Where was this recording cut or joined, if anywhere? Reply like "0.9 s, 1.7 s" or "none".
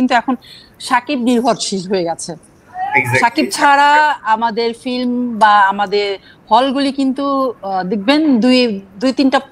none

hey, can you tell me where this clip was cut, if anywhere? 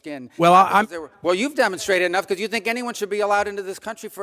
1.0 s

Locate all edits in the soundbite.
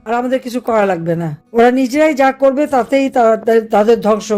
1.4 s

